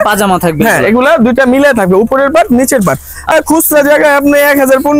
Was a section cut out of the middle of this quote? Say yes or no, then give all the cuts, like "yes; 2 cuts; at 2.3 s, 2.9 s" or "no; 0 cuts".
yes; 1 cut; at 3.3 s